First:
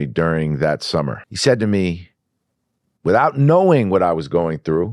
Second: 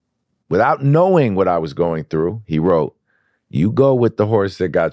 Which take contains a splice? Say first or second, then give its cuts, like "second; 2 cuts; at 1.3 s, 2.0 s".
first; 1 cut; at 1.2 s